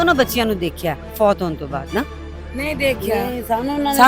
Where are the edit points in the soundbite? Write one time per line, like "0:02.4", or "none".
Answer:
0:01.0